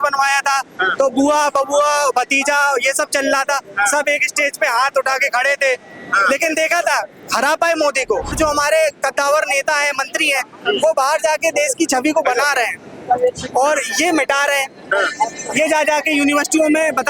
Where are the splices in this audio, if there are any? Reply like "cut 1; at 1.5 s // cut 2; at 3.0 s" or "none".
cut 1; at 8.3 s